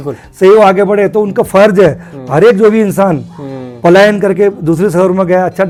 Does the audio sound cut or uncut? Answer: uncut